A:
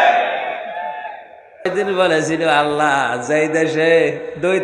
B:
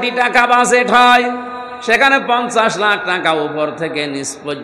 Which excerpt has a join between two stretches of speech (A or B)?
A